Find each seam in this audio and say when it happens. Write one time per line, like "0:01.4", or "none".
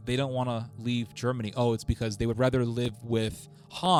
none